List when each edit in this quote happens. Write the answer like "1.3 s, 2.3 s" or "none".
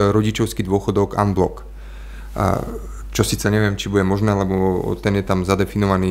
none